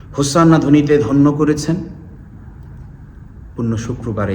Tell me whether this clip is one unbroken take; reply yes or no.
yes